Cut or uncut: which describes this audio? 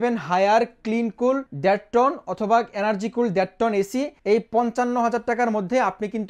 cut